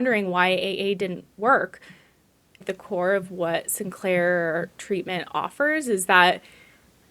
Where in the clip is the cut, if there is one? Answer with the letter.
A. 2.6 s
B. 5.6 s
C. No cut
A